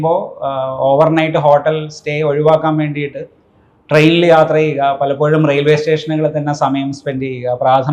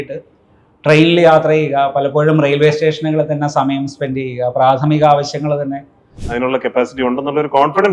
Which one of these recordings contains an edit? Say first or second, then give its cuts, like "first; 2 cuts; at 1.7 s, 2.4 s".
second; 1 cut; at 6.2 s